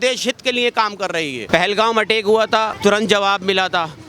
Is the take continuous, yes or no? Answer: no